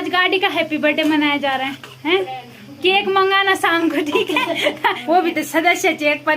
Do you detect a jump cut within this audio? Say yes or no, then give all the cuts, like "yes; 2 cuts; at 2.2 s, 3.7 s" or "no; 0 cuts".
yes; 1 cut; at 5.0 s